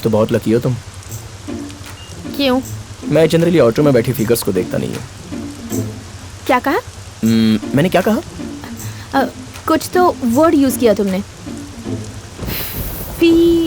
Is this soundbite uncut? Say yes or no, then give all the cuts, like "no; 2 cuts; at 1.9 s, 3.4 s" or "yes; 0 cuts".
yes; 0 cuts